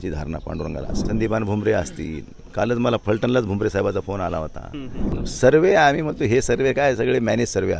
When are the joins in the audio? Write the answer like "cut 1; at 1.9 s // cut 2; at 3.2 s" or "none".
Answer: cut 1; at 0.9 s // cut 2; at 5.2 s